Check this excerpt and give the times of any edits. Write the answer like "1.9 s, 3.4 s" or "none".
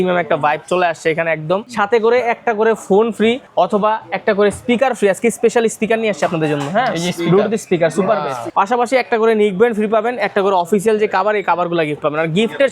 1.7 s, 3.4 s, 8.4 s